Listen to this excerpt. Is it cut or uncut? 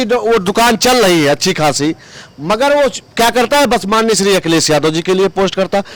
uncut